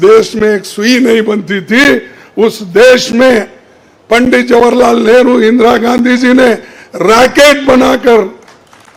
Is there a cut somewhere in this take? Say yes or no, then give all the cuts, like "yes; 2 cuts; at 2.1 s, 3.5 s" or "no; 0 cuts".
no; 0 cuts